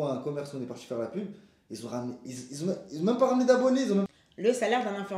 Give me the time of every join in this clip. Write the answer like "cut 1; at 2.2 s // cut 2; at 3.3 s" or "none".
cut 1; at 4.1 s